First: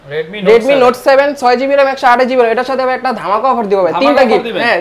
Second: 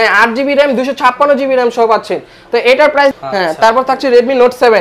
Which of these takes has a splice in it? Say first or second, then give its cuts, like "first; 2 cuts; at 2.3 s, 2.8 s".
second; 1 cut; at 3.2 s